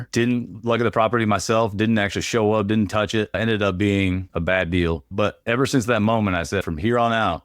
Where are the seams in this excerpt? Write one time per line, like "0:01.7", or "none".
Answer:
0:05.1